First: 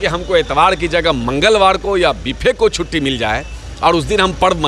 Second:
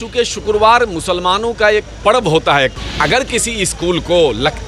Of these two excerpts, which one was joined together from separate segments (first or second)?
second